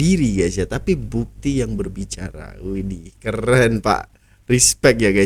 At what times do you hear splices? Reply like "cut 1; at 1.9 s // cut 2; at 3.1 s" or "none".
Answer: none